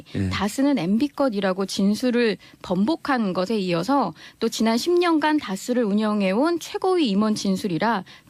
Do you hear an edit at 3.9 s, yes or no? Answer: yes